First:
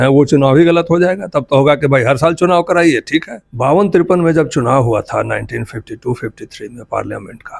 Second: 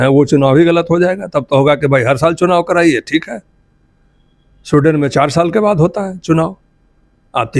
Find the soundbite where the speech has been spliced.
first; 1 cut; at 3.4 s

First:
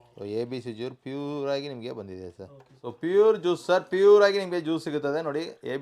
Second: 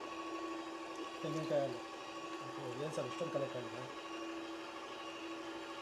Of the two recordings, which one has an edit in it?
first; 1 cut; at 2.8 s

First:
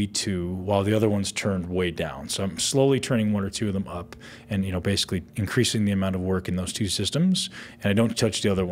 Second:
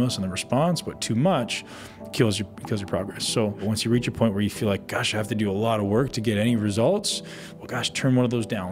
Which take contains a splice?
second; 1 cut; at 3.6 s

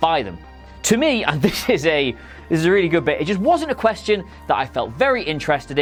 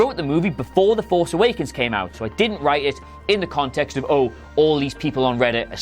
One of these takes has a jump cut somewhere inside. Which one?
second; 1 cut; at 2.2 s

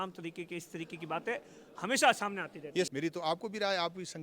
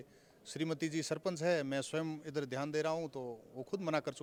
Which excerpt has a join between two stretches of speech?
first; 1 cut; at 2.9 s

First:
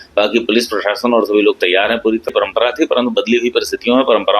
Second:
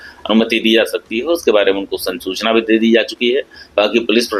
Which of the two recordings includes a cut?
first; 1 cut; at 2.3 s

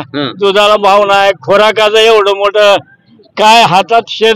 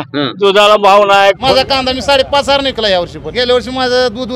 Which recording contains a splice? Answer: second; 2 cuts; at 1.4 s, 3.2 s

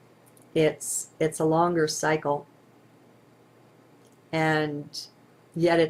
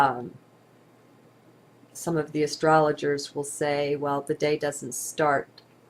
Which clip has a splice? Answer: second; 1 cut; at 4.8 s

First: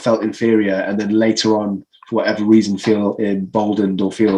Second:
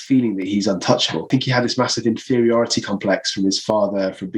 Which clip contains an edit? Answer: second; 1 cut; at 1.3 s

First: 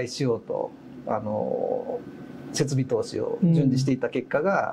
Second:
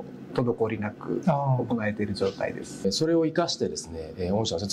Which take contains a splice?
second; 1 cut; at 2.9 s

